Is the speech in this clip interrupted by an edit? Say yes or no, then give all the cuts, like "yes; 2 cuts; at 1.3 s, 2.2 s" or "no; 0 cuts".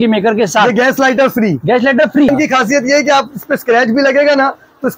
yes; 1 cut; at 2.3 s